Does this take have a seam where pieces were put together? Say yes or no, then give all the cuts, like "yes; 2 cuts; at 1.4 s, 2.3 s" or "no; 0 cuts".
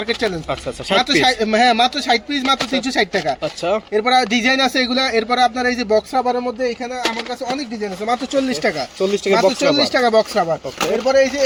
no; 0 cuts